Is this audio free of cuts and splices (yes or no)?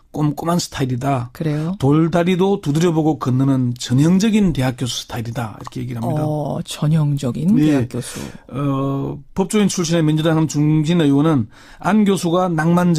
yes